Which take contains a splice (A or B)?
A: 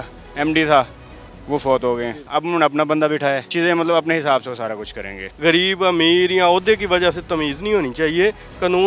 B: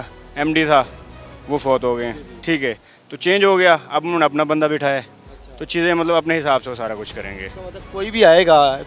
A